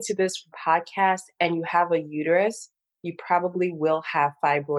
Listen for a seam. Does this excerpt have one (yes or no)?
no